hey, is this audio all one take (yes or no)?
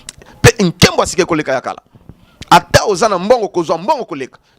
yes